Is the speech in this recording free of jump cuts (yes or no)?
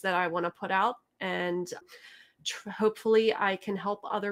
yes